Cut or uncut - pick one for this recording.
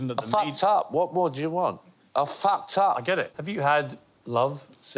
cut